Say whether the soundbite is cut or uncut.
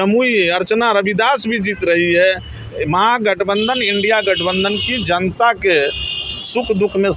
uncut